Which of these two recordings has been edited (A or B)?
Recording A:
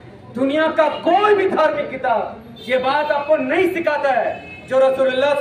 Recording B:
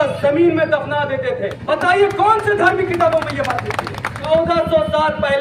B